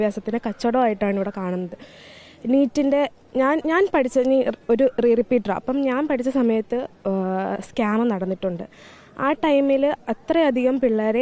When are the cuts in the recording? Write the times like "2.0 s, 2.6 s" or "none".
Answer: none